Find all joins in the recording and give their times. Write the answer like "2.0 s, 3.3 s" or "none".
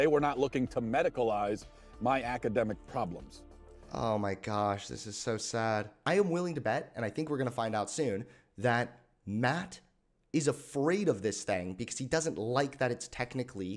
6.0 s